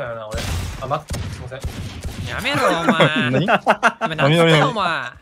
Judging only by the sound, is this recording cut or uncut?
uncut